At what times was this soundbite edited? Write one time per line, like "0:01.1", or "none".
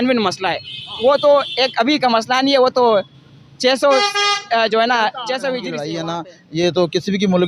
0:05.9